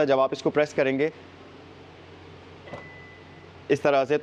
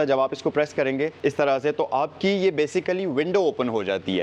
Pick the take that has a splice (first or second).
second